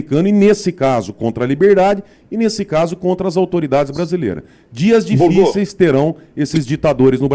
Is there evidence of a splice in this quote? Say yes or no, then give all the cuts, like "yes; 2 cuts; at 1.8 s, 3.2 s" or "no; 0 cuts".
no; 0 cuts